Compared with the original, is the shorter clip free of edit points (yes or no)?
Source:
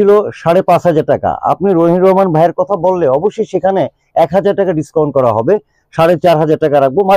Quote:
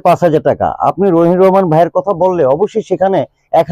yes